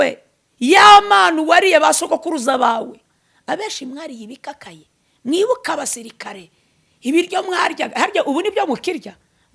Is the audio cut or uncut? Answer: cut